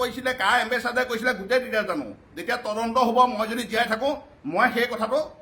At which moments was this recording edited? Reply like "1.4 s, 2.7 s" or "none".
none